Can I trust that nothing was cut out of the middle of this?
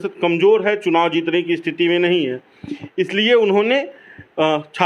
yes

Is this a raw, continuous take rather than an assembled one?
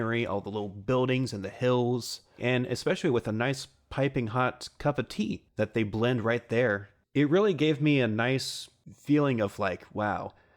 no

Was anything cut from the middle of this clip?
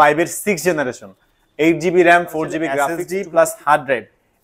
yes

